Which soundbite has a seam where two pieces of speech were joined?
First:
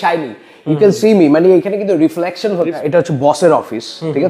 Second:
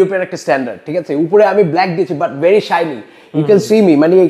first; 1 cut; at 2.7 s

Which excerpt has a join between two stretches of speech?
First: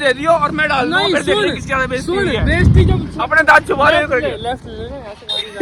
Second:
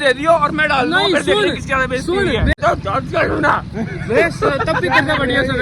second; 1 cut; at 2.6 s

